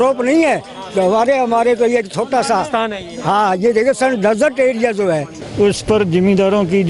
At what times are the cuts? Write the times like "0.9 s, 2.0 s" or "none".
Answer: 5.3 s